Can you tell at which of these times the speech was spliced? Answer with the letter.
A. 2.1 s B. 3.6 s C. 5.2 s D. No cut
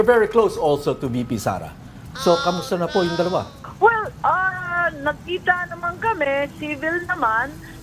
B